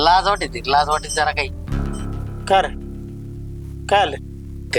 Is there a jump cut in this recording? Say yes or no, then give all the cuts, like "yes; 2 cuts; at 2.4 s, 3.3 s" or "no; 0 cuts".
no; 0 cuts